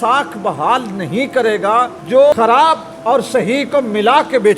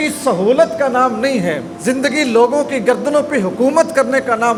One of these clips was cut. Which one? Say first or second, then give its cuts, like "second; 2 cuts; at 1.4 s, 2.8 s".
first; 1 cut; at 2.4 s